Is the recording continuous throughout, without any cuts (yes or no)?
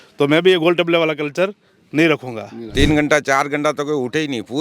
no